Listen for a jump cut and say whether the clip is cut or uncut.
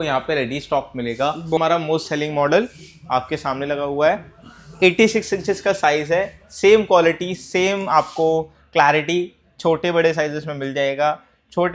cut